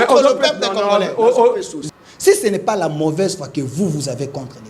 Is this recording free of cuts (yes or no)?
no